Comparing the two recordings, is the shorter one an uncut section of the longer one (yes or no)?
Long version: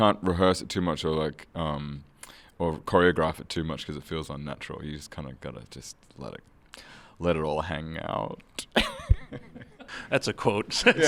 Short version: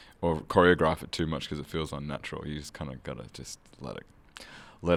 yes